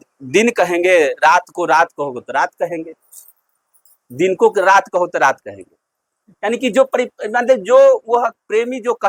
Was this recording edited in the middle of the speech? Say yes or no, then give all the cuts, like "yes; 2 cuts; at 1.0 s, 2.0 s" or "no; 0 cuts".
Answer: no; 0 cuts